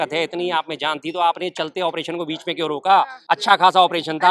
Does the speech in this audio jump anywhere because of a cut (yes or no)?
yes